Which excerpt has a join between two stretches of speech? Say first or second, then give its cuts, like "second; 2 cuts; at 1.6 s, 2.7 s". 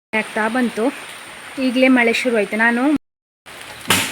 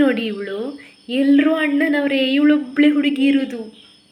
first; 1 cut; at 3.0 s